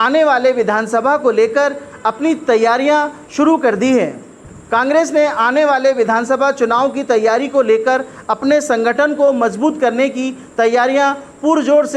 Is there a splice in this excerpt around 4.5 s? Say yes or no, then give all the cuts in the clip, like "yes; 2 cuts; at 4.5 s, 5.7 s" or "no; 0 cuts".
no; 0 cuts